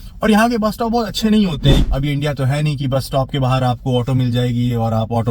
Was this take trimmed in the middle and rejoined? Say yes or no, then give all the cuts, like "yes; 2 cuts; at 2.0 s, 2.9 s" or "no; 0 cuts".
yes; 1 cut; at 1.8 s